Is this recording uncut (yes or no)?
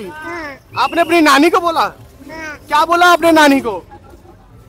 yes